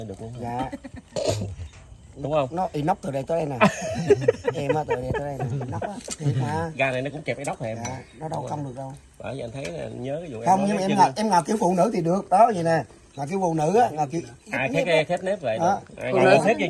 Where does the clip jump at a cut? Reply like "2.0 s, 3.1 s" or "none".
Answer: none